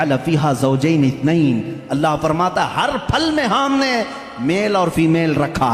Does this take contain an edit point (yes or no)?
no